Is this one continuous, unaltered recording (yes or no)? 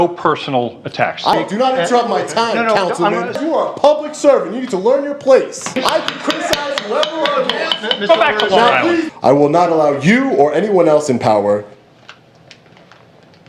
no